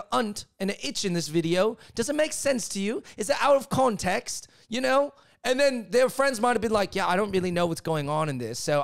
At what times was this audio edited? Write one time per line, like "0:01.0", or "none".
none